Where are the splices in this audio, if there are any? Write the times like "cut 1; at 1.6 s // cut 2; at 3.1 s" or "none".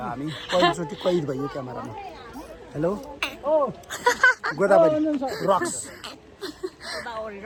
none